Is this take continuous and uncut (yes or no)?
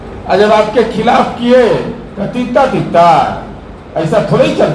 yes